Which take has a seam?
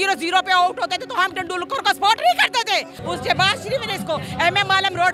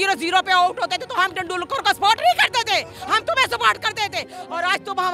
first; 1 cut; at 2.9 s

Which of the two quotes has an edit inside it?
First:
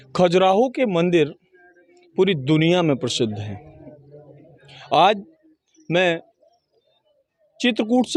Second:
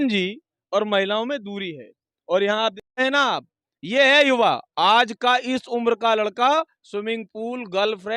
second; 1 cut; at 3.0 s

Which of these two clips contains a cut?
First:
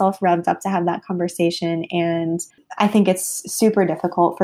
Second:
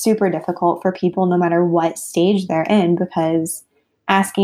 first; 1 cut; at 2.6 s

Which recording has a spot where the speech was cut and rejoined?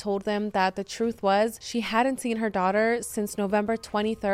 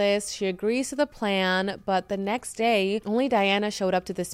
first; 1 cut; at 1.6 s

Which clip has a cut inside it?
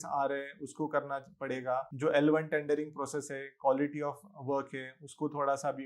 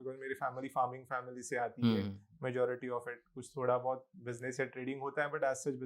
first; 1 cut; at 1.9 s

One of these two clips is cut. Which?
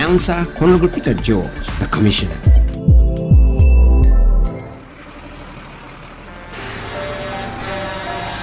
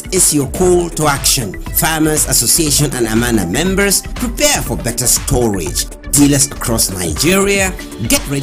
first; 1 cut; at 4.8 s

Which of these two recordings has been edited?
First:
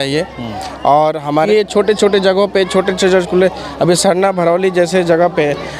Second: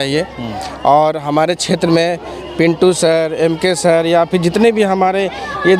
first; 1 cut; at 1.5 s

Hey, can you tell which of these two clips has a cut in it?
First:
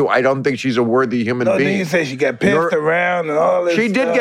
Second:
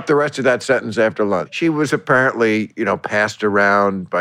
second; 1 cut; at 1.5 s

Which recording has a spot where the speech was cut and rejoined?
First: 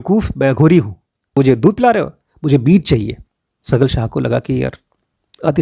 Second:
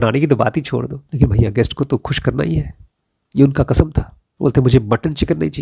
first; 1 cut; at 1.4 s

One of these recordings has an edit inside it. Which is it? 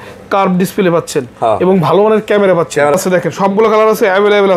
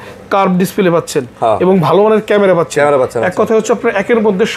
first; 1 cut; at 2.9 s

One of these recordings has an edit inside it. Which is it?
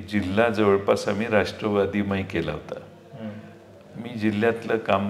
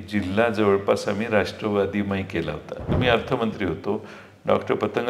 second; 1 cut; at 2.9 s

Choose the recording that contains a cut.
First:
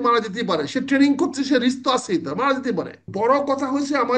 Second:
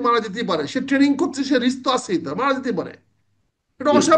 first; 1 cut; at 3.1 s

